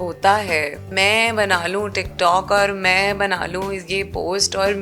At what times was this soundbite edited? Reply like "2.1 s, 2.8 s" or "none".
0.9 s